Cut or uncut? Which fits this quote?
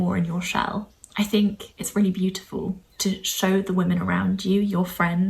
cut